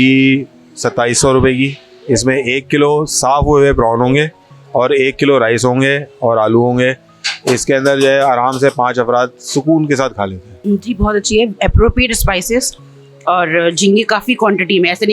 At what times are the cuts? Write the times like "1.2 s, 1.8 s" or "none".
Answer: 10.5 s